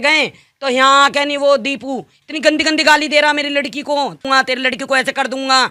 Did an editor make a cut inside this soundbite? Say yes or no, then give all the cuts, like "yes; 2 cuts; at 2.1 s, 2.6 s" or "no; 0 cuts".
no; 0 cuts